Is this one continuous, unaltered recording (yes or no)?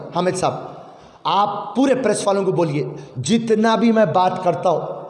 yes